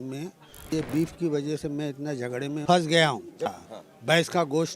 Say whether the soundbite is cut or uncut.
cut